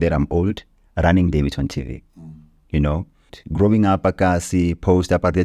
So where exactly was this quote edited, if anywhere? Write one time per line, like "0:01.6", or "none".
0:03.3